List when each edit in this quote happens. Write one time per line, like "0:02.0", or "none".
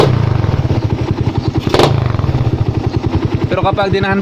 0:01.3
0:03.2

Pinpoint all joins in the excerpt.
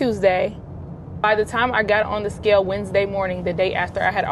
0:01.2

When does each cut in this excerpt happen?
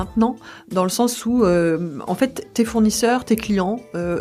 none

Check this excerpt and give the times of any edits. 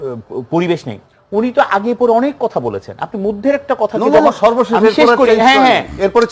none

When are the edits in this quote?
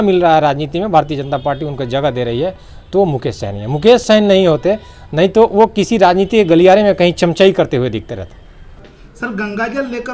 none

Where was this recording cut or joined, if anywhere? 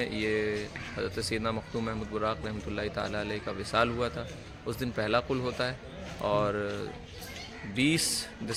none

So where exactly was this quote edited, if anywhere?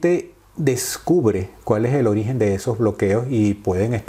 none

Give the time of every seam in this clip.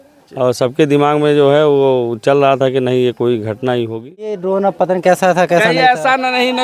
0:04.4

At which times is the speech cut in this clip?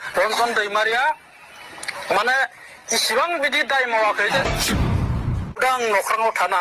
none

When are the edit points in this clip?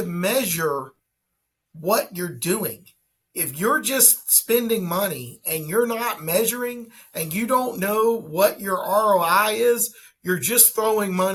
none

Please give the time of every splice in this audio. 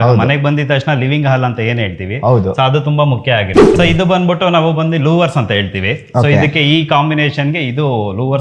0:03.7

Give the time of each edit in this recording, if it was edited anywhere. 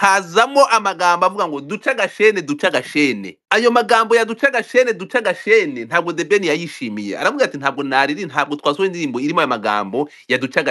0:03.3

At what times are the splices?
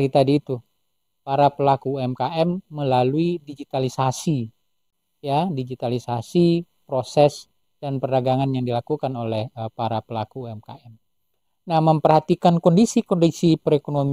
none

